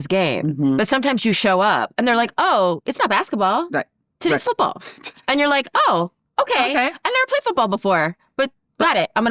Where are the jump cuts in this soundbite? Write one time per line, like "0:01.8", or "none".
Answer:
none